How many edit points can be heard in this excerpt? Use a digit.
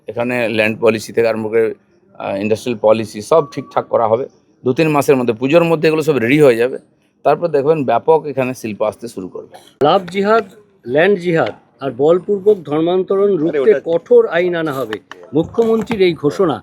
1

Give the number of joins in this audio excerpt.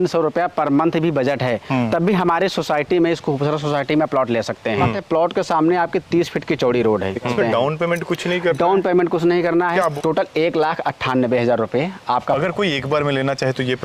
4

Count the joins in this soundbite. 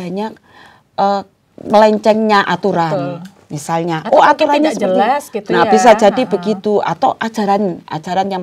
0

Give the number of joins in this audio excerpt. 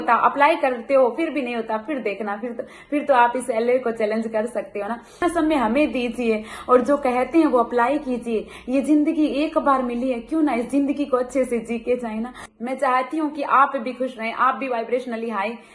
2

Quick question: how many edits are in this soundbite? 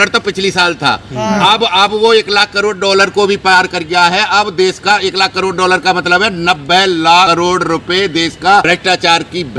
2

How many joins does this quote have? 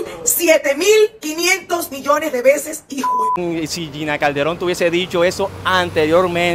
1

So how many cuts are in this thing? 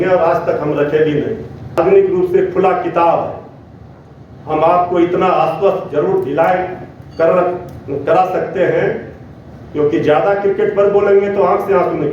1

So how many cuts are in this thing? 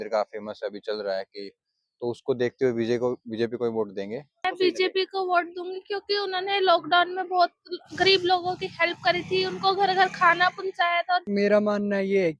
2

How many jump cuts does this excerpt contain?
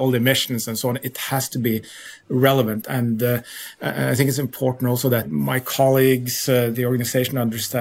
3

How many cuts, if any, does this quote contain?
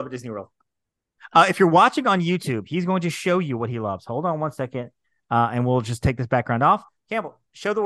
1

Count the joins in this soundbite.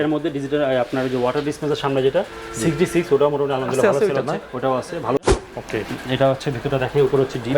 1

